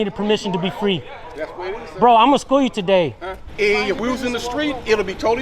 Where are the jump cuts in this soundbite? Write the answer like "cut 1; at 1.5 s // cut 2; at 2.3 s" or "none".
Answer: cut 1; at 3.4 s